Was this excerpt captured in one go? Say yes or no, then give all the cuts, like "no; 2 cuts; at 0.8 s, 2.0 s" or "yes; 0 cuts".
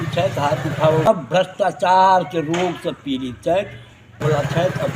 no; 2 cuts; at 1.1 s, 4.2 s